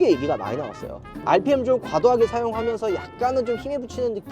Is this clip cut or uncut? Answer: cut